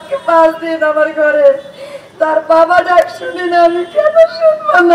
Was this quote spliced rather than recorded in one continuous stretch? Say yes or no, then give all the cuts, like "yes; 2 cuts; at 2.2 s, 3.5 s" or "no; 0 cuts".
no; 0 cuts